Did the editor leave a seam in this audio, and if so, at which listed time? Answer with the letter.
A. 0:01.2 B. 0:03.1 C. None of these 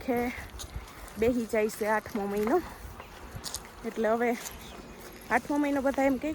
C